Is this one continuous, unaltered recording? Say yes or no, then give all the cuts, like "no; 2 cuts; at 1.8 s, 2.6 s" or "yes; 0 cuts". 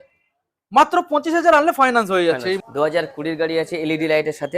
no; 1 cut; at 2.6 s